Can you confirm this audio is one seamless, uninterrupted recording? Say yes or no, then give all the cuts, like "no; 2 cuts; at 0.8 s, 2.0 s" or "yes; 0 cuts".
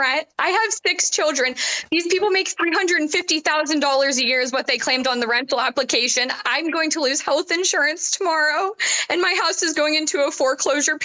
yes; 0 cuts